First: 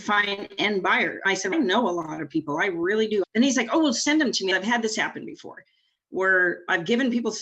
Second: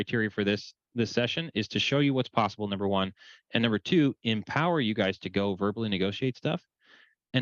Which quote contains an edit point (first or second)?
first